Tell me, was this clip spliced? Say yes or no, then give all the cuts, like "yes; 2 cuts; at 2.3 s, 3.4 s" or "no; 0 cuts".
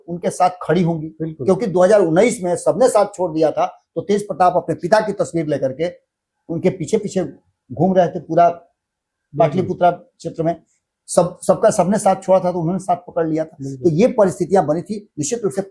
no; 0 cuts